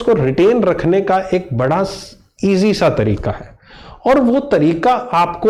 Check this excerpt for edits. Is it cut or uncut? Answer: uncut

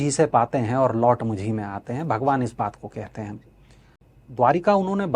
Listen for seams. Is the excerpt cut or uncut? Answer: uncut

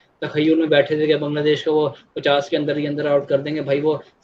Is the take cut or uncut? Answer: uncut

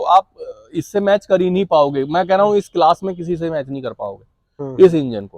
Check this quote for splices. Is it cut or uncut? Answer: uncut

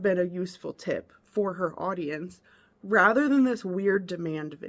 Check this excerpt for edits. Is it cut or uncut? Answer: uncut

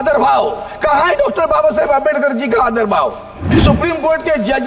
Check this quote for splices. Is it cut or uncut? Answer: cut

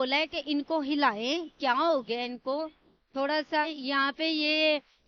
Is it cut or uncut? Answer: cut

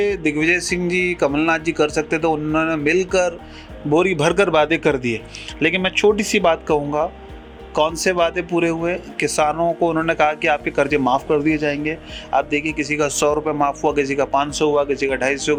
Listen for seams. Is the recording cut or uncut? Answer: uncut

